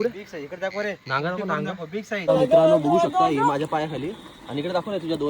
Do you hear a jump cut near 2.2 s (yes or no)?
yes